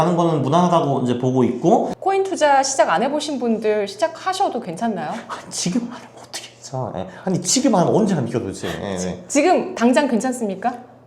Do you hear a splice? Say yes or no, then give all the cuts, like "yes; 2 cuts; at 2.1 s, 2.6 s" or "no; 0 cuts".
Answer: yes; 1 cut; at 1.9 s